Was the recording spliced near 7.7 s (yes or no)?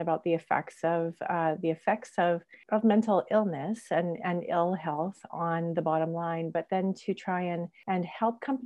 yes